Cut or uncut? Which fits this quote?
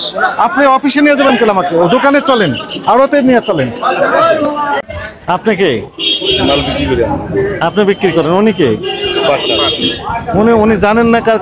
cut